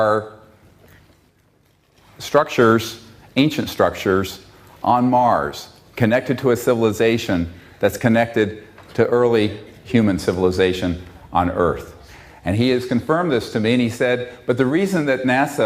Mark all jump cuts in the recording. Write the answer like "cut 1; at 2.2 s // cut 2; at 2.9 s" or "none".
cut 1; at 2.8 s